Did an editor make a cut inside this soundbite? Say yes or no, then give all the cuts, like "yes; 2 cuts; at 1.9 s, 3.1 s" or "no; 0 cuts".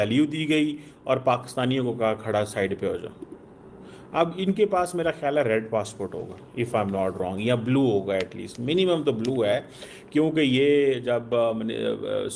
no; 0 cuts